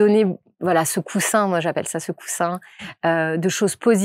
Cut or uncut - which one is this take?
uncut